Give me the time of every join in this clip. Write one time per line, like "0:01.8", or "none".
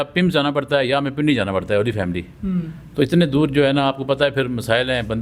none